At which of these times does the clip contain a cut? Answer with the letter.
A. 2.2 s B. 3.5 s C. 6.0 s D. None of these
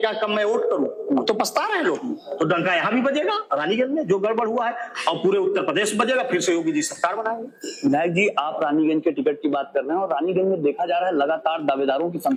D